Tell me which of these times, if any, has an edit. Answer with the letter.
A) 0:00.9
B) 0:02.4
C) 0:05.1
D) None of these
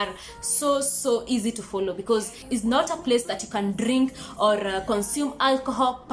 B